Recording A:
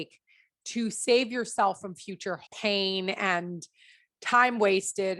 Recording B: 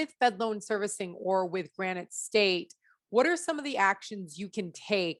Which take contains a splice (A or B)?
A